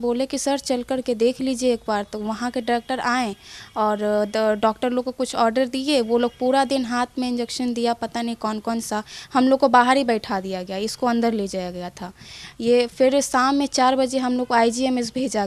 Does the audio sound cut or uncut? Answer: uncut